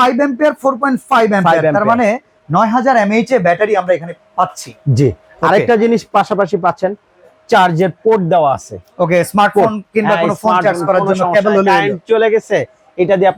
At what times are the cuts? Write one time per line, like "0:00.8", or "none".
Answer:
none